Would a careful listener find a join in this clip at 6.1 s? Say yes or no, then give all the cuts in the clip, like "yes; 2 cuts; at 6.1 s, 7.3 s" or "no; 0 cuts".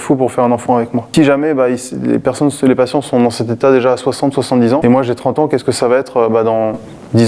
no; 2 cuts; at 1.1 s, 4.8 s